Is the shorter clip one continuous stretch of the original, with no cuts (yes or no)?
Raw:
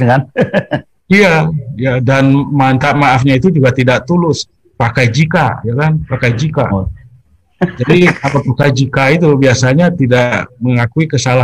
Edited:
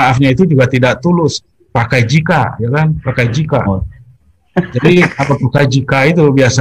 yes